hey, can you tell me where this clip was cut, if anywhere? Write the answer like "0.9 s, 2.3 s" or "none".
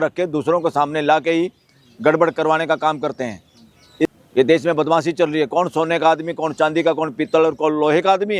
4.1 s